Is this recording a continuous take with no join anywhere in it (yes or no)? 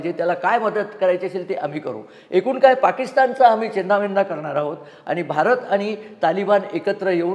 yes